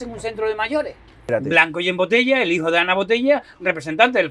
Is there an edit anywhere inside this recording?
yes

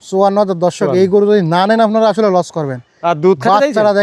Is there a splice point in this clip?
no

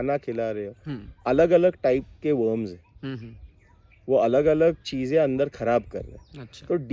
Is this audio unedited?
yes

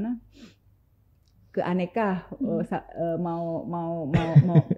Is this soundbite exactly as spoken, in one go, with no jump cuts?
yes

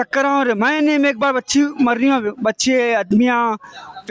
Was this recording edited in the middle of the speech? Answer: no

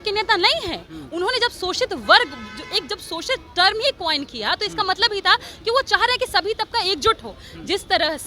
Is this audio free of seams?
yes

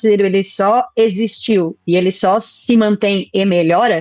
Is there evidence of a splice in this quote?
no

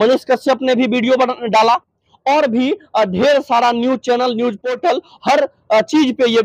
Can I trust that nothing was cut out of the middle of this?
no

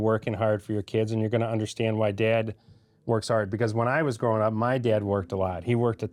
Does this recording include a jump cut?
no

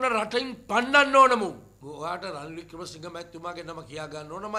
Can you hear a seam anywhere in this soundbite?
yes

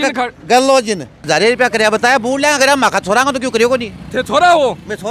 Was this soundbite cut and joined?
yes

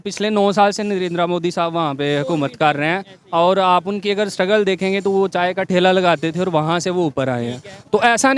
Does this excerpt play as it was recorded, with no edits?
yes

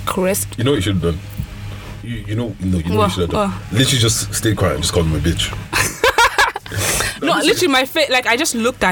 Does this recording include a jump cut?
no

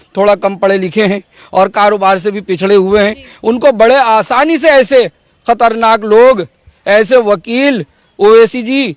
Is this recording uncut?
yes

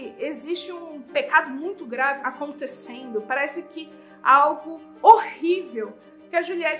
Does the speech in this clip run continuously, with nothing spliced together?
no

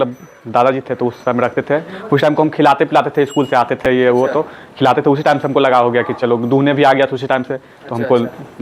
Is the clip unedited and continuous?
yes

